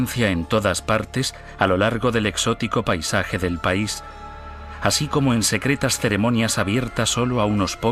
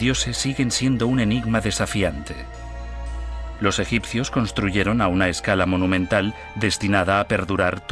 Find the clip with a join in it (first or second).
second